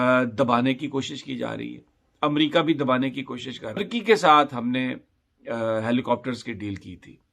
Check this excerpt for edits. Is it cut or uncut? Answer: cut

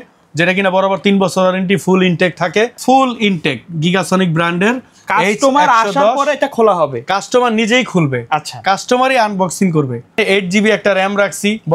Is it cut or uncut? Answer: cut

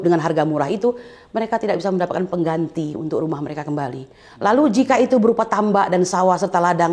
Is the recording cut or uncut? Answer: uncut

